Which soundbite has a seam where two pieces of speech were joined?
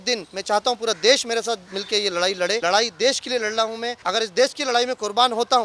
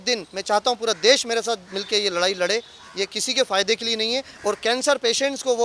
first; 2 cuts; at 2.6 s, 4.0 s

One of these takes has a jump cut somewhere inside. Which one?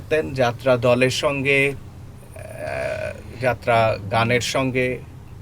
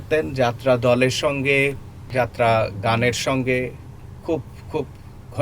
second; 1 cut; at 1.9 s

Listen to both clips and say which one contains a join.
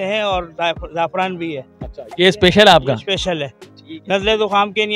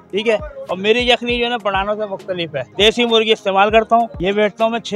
second; 2 cuts; at 2.7 s, 4.1 s

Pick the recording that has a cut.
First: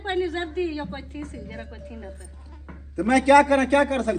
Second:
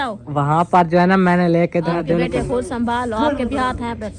second; 1 cut; at 2.0 s

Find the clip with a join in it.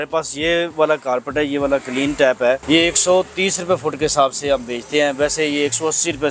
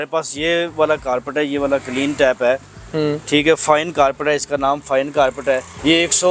first; 1 cut; at 2.6 s

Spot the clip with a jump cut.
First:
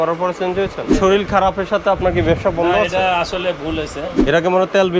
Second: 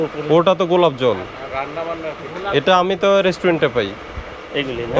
first; 2 cuts; at 0.9 s, 4.1 s

